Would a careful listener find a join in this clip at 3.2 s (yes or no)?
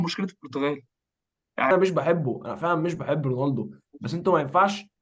no